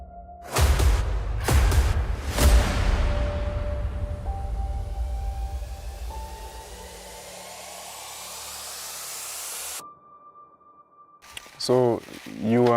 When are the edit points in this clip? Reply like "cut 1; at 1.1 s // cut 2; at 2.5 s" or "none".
cut 1; at 11.9 s